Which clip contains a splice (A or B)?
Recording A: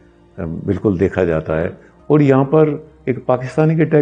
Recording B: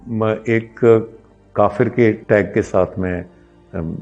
B